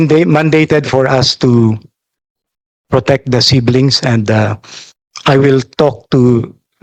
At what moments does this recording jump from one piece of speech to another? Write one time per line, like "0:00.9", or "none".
none